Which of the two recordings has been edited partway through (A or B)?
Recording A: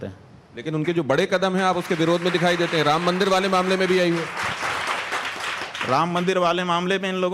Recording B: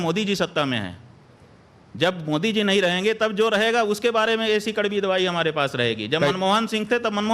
B